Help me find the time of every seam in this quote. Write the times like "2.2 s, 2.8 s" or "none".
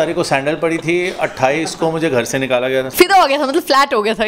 2.9 s